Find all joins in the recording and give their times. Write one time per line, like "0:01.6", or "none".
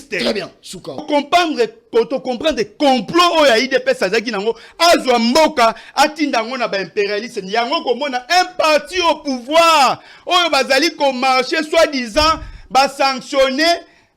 0:01.0